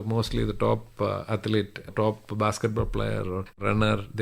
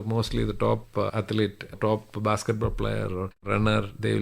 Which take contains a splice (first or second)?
second